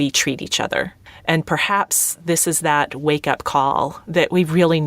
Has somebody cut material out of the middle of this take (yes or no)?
yes